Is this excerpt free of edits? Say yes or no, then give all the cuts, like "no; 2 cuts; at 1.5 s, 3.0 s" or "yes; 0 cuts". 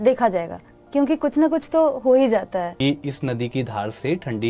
no; 1 cut; at 2.7 s